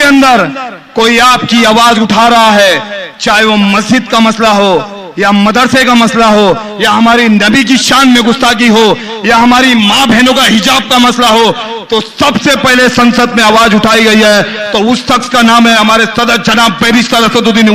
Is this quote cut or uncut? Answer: uncut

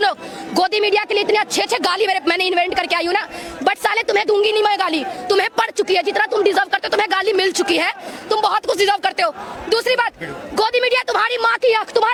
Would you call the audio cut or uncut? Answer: uncut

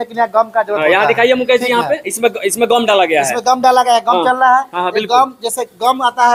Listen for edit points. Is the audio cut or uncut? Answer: uncut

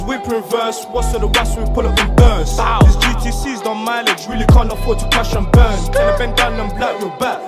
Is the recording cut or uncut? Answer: uncut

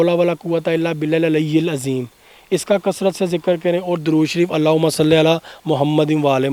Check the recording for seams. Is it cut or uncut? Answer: uncut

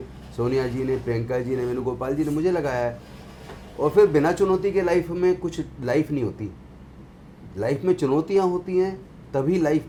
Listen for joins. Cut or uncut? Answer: uncut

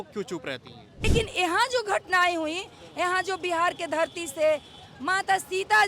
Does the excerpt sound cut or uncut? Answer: cut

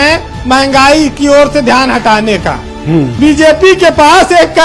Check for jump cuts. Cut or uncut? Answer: cut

